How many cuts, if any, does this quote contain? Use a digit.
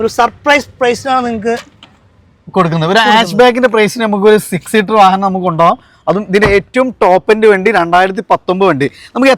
0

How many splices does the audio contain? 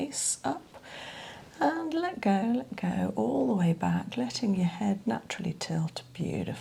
0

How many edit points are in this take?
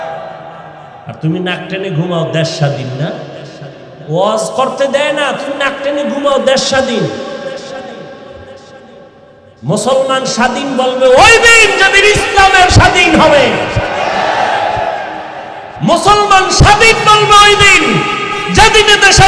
0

